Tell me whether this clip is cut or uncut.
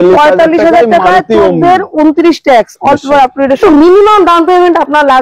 cut